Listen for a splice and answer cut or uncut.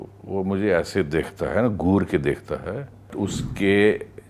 cut